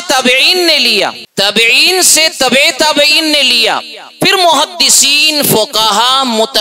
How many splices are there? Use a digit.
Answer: 1